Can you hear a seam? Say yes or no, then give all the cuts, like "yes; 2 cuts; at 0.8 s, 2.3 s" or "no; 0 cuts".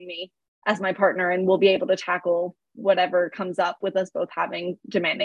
no; 0 cuts